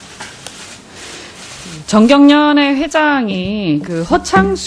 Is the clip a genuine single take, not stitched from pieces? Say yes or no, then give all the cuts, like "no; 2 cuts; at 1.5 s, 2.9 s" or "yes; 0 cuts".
yes; 0 cuts